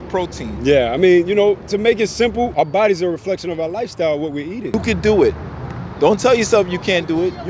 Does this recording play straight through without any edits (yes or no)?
no